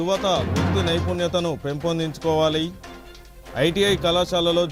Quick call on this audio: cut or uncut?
uncut